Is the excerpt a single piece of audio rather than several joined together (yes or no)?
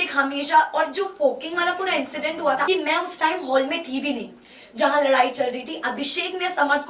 no